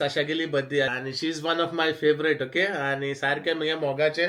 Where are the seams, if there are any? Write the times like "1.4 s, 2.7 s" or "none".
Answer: 0.9 s